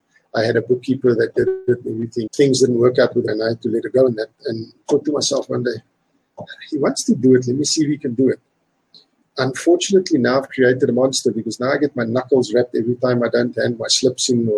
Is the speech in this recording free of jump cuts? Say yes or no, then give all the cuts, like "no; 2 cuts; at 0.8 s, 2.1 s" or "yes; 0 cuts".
no; 2 cuts; at 2.3 s, 3.3 s